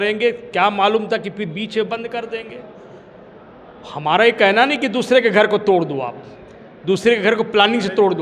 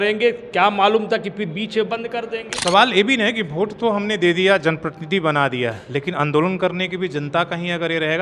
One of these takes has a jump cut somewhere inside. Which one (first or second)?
second